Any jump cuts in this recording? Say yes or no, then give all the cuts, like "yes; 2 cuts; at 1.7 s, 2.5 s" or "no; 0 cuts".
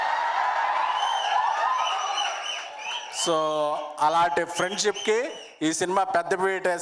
no; 0 cuts